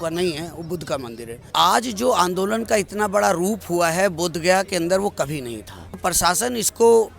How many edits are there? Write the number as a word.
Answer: two